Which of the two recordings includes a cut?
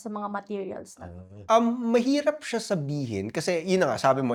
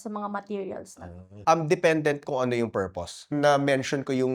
second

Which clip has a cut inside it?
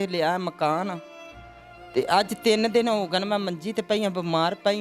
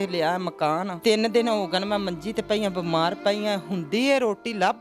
second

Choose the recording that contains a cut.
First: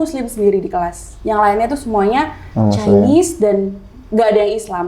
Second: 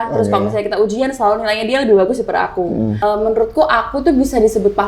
second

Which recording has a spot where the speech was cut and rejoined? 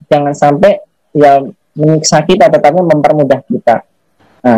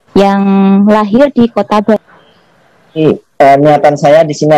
second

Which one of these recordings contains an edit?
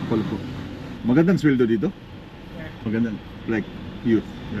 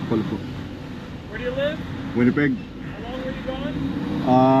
first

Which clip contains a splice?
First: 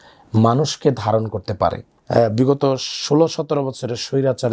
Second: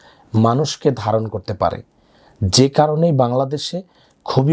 first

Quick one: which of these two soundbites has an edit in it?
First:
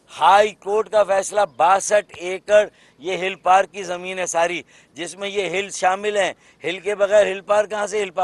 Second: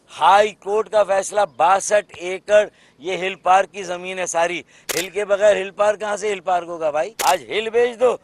second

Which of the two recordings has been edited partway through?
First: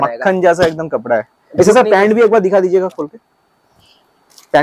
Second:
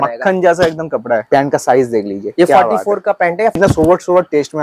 second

